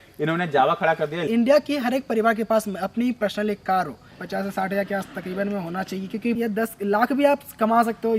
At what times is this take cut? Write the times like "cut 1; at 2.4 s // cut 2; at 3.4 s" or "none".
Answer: cut 1; at 1.2 s // cut 2; at 4.0 s // cut 3; at 6.3 s